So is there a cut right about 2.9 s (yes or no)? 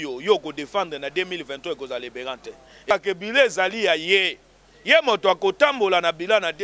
yes